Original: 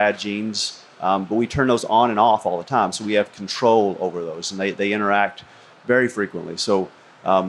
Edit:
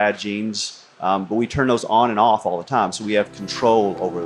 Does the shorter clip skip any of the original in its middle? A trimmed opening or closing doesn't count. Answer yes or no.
no